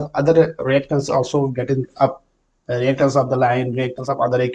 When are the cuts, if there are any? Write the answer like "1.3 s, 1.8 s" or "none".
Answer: none